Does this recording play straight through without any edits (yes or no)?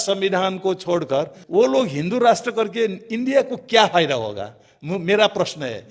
yes